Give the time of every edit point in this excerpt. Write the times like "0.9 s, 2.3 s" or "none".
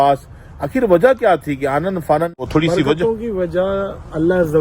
2.5 s

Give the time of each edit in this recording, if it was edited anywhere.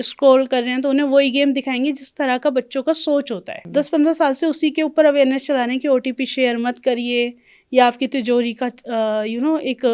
3.6 s

